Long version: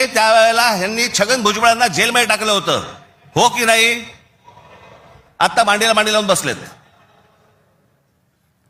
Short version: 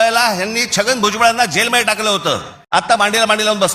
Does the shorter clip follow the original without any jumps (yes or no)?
no